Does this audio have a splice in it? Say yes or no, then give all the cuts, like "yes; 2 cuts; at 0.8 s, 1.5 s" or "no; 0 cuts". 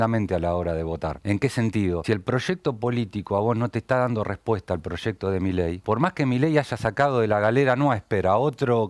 yes; 3 cuts; at 1.2 s, 2.0 s, 5.8 s